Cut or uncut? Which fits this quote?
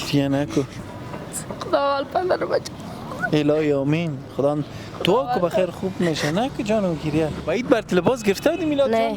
cut